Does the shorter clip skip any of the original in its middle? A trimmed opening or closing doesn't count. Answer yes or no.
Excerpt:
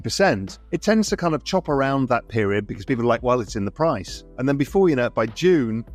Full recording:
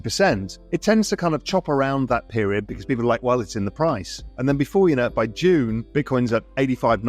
no